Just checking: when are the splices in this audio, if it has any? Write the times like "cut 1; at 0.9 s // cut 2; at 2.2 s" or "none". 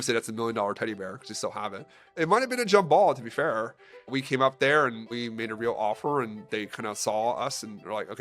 cut 1; at 2.1 s // cut 2; at 4.1 s // cut 3; at 5.1 s